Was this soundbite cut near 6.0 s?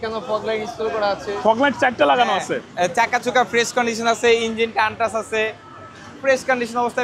no; 0 cuts

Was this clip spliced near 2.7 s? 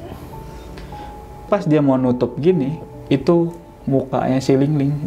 no; 1 cut; at 1.4 s

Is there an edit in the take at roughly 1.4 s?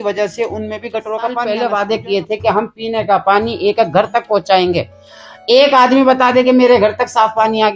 yes; 1 cut; at 1.4 s

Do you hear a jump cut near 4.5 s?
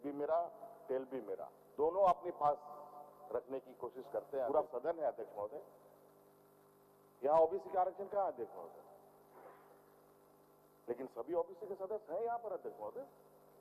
yes; 1 cut; at 4.5 s

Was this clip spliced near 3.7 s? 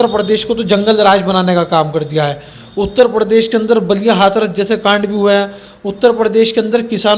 no; 0 cuts

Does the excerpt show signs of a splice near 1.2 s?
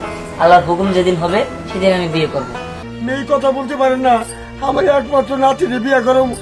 no; 1 cut; at 2.9 s

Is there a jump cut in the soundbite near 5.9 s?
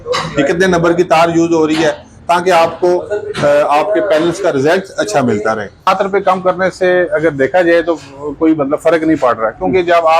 yes; 1 cut; at 5.9 s

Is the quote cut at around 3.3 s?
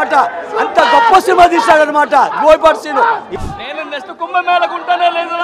yes; 1 cut; at 3.3 s

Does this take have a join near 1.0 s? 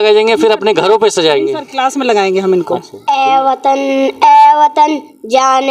no; 1 cut; at 2.9 s

